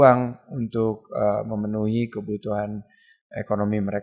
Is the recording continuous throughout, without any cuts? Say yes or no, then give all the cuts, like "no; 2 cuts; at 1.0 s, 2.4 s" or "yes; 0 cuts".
yes; 0 cuts